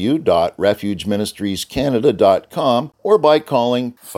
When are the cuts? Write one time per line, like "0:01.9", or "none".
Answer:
0:02.9